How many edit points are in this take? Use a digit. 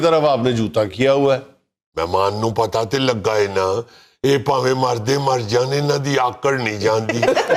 0